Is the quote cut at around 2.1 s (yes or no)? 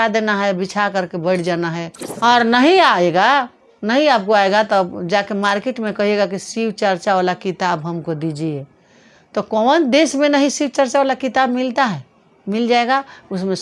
yes